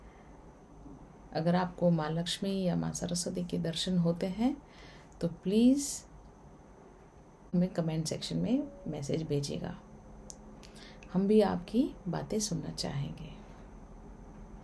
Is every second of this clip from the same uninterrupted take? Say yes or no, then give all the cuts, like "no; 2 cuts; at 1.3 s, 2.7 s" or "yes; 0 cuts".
no; 1 cut; at 7.5 s